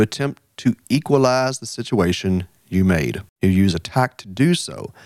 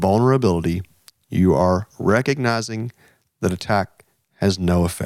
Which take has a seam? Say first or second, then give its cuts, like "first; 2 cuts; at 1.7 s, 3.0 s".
first; 1 cut; at 3.2 s